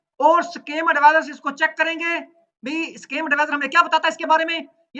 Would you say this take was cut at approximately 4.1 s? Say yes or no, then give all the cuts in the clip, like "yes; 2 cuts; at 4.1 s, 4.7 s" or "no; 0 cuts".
no; 0 cuts